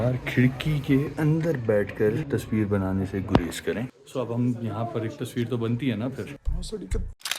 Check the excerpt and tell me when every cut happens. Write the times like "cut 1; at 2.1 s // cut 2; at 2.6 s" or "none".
cut 1; at 1.1 s // cut 2; at 2.2 s // cut 3; at 4.0 s